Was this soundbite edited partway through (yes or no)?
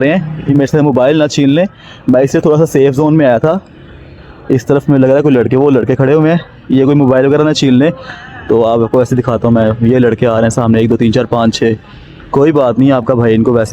no